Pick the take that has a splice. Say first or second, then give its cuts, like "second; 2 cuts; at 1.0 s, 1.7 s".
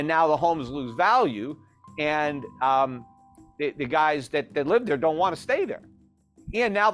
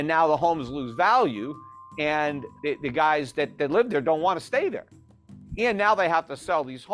second; 1 cut; at 2.5 s